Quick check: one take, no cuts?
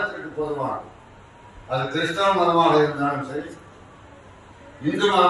yes; 0 cuts

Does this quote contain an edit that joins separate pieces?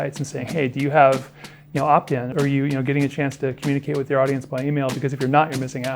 yes; 1 cut; at 2.3 s

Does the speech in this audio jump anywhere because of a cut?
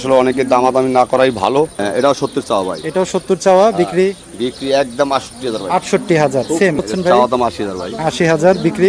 yes; 2 cuts; at 1.8 s, 6.8 s

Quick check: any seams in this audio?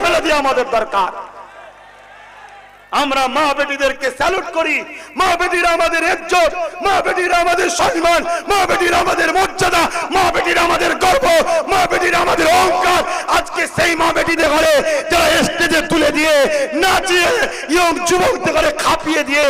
no; 0 cuts

